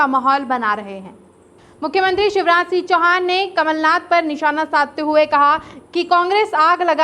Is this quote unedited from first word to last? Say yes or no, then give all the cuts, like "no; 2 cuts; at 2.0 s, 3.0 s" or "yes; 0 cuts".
yes; 0 cuts